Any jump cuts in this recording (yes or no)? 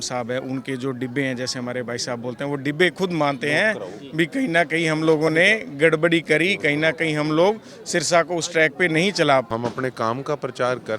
yes